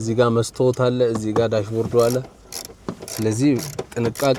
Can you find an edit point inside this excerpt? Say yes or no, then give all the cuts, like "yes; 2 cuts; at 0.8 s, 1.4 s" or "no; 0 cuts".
no; 0 cuts